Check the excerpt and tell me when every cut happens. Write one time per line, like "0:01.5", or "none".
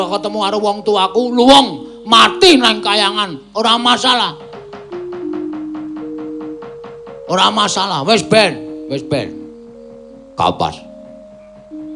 0:10.9